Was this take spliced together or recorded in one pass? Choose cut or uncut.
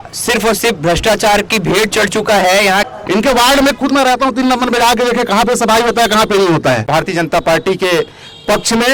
cut